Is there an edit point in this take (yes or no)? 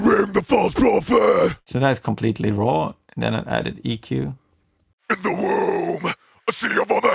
no